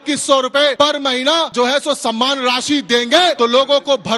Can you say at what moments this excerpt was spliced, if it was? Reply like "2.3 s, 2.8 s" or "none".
1.1 s, 3.4 s

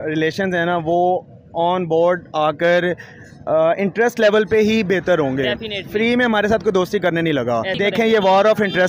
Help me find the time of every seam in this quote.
7.7 s

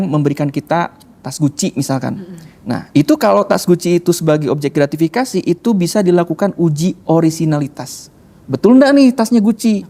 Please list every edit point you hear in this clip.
none

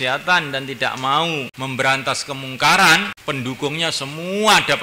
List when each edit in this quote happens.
1.5 s, 3.1 s

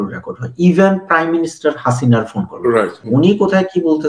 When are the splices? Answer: 3.0 s

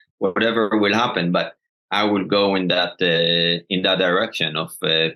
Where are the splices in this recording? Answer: none

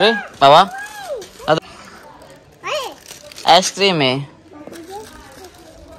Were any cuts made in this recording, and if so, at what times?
1.6 s

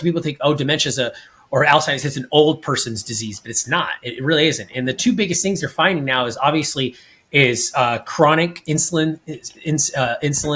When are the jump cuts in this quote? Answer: none

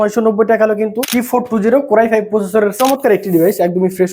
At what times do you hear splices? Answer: 1.0 s, 2.8 s

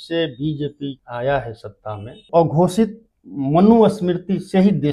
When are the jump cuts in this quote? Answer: 1.0 s, 2.3 s

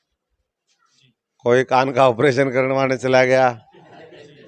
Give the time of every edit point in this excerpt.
none

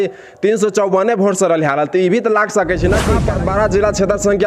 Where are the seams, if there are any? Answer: 3.0 s

